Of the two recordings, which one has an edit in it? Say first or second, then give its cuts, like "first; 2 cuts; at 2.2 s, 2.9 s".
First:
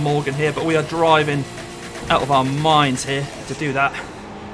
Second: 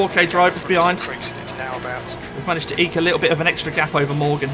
second; 1 cut; at 2.2 s